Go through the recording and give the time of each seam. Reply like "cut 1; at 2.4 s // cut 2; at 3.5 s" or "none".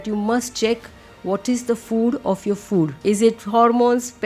cut 1; at 3.0 s